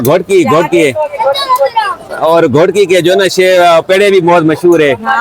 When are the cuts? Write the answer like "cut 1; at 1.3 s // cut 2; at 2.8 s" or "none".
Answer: none

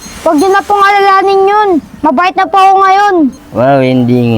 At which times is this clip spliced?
cut 1; at 3.4 s

